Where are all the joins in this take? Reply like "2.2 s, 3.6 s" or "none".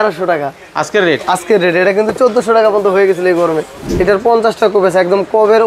3.8 s